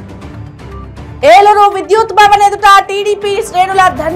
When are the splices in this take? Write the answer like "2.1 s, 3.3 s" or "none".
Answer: 1.2 s